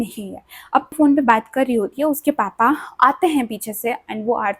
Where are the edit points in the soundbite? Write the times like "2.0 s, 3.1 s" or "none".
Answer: 0.9 s